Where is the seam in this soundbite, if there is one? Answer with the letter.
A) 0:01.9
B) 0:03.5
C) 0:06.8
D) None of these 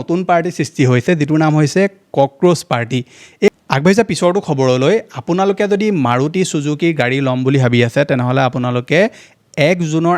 B